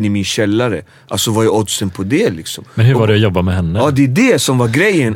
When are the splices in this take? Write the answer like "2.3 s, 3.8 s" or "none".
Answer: none